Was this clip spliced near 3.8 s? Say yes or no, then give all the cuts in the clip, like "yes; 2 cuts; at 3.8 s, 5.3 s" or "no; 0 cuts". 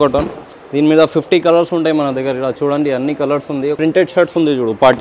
yes; 1 cut; at 3.8 s